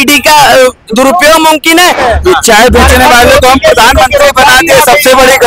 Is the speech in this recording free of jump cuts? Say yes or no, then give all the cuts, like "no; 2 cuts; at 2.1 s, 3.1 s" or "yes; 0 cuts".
no; 1 cut; at 2.0 s